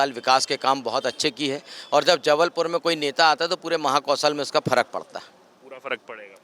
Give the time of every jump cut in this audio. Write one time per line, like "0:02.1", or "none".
none